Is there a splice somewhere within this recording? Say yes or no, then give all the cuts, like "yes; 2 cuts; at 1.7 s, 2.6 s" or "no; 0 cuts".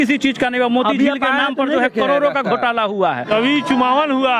yes; 1 cut; at 3.3 s